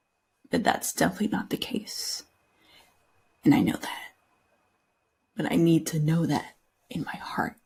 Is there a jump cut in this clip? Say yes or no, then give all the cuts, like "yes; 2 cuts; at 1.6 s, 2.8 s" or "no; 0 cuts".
no; 0 cuts